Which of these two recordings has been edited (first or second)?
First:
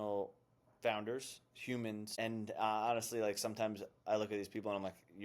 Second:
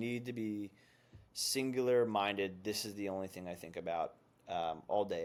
first